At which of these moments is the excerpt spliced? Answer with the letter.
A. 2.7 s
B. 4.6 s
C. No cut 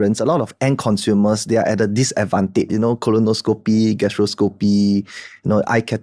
A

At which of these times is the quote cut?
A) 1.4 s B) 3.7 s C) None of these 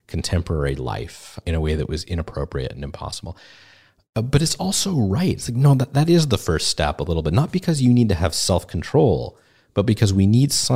A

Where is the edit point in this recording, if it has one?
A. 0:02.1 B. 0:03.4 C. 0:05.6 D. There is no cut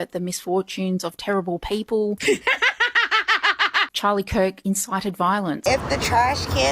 C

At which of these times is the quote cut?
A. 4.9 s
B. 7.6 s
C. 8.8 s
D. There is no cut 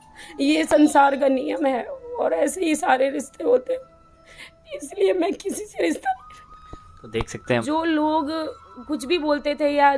B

